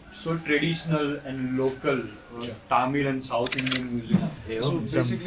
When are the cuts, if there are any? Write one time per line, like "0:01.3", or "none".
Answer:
0:04.3